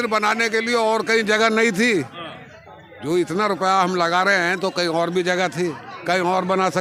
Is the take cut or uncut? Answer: uncut